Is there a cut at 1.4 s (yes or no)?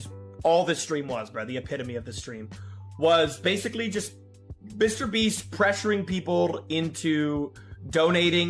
no